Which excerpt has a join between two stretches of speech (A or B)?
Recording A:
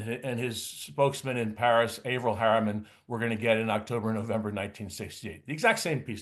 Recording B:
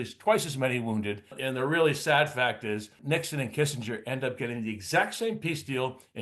B